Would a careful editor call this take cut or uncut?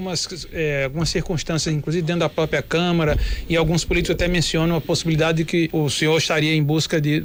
uncut